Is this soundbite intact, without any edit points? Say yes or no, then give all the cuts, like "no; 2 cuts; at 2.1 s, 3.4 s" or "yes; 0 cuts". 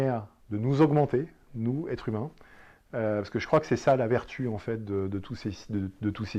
yes; 0 cuts